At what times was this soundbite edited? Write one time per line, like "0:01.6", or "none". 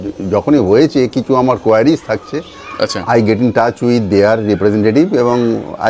none